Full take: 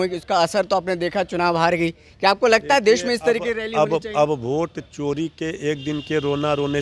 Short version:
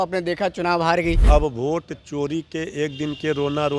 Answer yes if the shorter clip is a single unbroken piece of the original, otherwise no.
no